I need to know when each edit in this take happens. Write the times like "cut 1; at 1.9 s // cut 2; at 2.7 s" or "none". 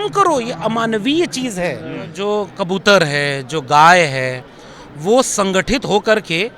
cut 1; at 2.1 s